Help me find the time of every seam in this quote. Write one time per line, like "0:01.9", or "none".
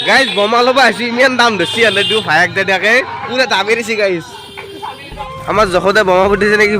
0:05.0